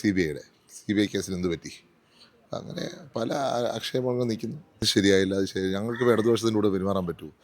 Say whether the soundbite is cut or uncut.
cut